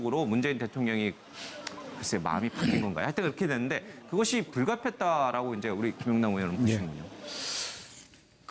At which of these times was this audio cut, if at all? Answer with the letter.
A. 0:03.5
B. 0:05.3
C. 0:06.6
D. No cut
A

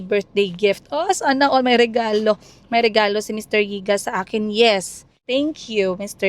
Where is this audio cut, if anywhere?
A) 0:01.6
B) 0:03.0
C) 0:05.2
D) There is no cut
C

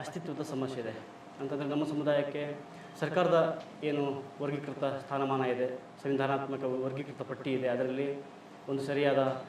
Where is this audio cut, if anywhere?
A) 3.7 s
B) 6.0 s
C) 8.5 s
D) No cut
D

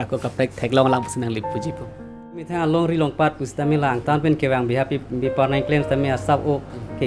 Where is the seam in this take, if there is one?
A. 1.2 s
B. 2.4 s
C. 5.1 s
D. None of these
B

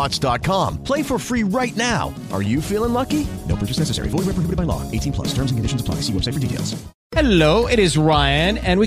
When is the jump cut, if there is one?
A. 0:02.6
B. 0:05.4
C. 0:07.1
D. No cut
C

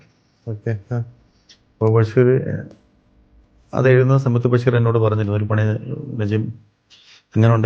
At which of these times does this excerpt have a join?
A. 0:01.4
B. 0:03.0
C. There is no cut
C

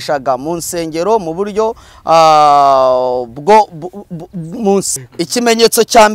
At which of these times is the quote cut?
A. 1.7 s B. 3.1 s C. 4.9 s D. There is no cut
C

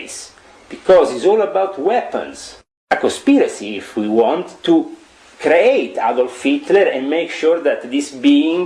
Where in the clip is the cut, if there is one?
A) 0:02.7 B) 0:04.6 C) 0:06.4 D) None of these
A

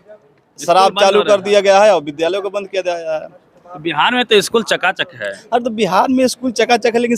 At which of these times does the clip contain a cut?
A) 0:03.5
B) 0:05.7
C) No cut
C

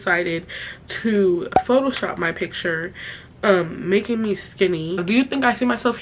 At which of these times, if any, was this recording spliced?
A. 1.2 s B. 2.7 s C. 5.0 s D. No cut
C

